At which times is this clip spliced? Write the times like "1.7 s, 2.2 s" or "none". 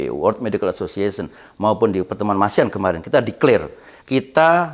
none